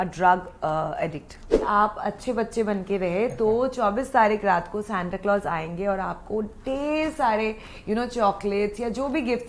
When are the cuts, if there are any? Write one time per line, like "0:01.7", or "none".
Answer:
0:01.6